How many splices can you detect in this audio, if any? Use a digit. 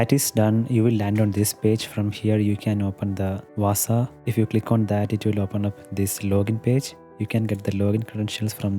2